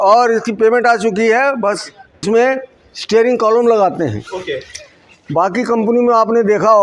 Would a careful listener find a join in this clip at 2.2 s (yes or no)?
yes